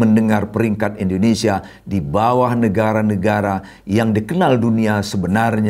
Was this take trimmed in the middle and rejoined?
no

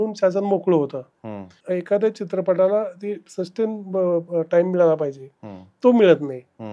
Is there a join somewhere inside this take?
yes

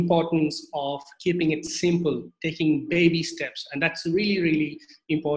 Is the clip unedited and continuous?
yes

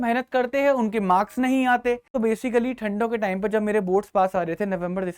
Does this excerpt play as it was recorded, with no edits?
no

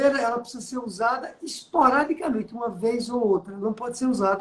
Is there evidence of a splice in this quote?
no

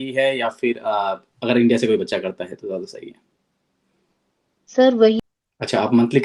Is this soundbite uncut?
no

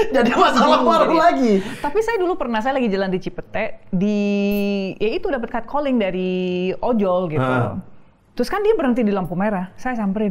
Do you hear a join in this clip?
no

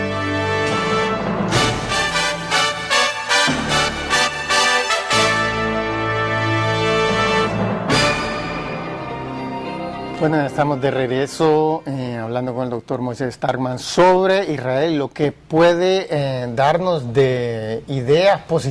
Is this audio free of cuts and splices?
yes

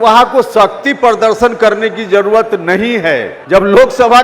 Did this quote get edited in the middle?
yes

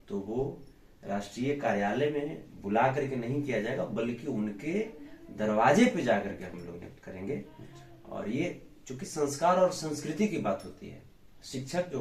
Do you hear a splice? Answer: no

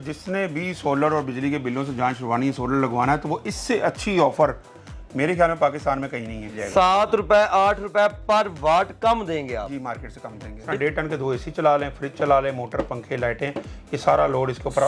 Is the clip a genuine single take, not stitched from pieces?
no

